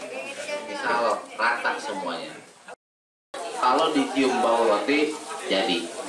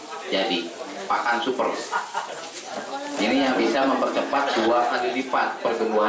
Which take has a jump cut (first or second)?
first